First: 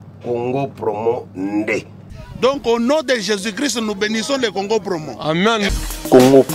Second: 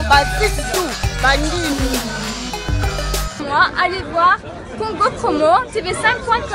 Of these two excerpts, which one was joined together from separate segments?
second; 1 cut; at 3.4 s

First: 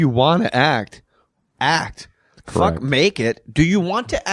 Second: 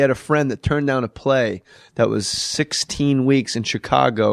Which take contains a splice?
first; 1 cut; at 2.4 s

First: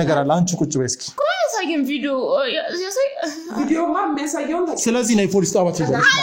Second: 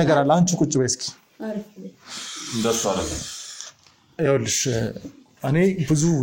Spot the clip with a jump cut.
first; 1 cut; at 1.2 s

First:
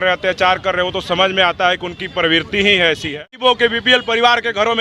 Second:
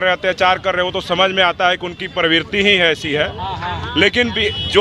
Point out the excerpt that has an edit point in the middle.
first; 1 cut; at 3.4 s

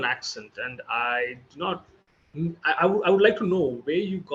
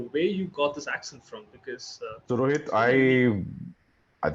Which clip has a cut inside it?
second; 1 cut; at 2.2 s

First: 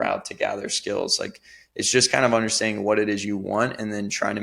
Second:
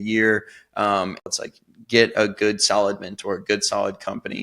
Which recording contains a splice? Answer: second; 1 cut; at 1.3 s

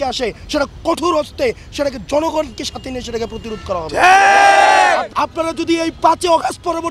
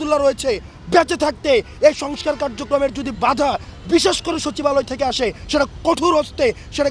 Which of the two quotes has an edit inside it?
first; 1 cut; at 5.1 s

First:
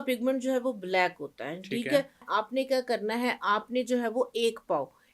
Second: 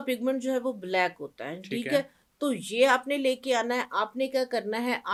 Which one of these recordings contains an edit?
first; 1 cut; at 2.2 s

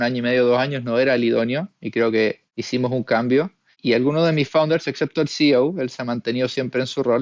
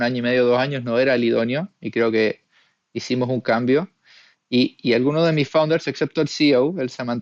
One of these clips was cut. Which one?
first; 2 cuts; at 2.5 s, 3.8 s

